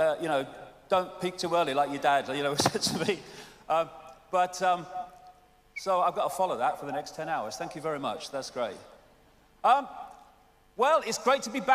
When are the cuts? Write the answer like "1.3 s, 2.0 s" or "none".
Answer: none